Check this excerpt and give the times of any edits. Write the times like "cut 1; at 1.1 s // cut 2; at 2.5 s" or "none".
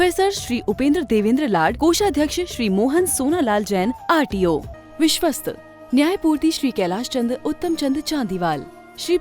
cut 1; at 4.8 s